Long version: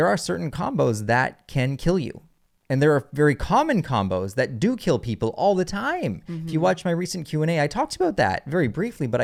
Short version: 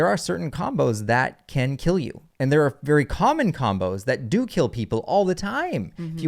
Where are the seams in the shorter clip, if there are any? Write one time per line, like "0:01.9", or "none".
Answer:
0:02.2